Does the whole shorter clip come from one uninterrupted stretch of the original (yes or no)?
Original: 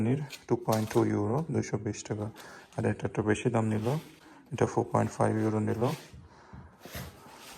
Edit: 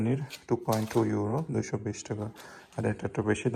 yes